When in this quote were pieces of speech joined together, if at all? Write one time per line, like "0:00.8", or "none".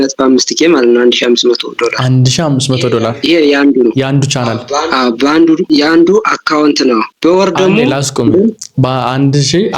0:05.6
0:07.1